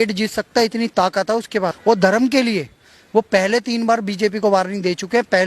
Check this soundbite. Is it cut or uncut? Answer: cut